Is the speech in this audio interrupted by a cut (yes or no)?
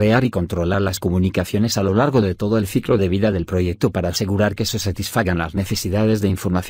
no